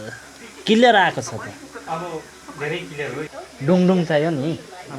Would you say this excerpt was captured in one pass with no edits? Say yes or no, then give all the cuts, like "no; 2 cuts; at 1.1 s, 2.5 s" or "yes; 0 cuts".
no; 1 cut; at 3.5 s